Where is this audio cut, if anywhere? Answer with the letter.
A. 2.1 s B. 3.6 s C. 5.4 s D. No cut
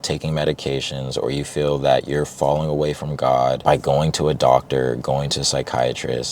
B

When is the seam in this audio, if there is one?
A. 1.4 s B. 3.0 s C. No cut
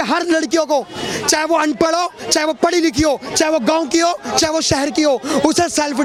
C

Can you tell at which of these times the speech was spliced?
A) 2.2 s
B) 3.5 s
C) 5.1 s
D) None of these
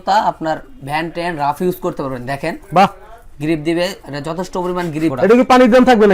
C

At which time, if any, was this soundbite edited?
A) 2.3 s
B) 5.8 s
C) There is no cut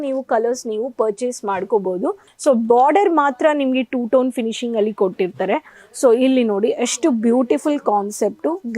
A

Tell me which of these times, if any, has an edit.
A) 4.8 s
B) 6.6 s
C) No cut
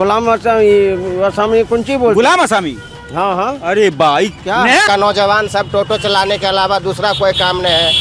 A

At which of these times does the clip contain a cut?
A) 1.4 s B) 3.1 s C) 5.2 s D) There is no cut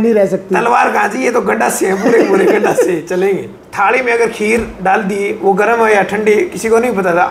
B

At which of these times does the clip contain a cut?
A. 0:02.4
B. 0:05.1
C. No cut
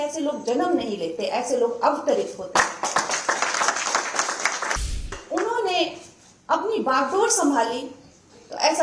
B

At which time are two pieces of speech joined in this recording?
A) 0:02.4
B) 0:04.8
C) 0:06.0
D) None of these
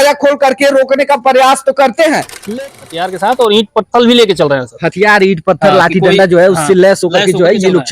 A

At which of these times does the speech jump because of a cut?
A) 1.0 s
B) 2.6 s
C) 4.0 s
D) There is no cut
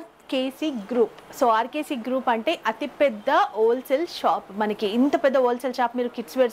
D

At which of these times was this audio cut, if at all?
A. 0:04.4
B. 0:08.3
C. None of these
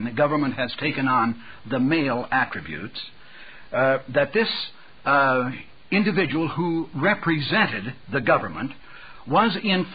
B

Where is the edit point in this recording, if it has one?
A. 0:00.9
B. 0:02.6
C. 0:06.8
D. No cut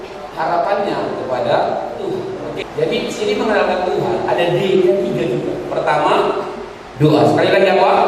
B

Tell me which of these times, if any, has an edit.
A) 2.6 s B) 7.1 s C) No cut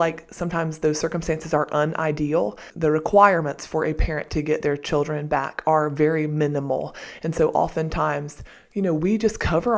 A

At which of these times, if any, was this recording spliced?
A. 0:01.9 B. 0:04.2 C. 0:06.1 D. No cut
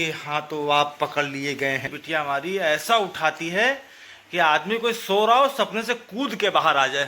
A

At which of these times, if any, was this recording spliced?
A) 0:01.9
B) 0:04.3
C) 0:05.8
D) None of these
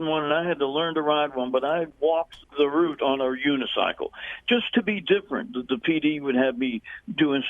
A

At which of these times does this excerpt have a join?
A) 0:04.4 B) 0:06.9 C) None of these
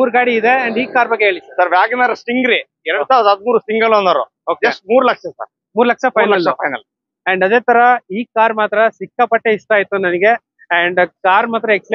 C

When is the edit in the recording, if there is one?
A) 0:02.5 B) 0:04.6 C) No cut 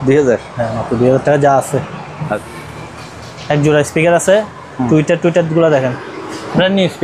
A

